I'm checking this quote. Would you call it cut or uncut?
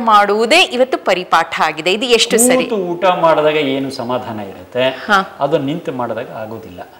uncut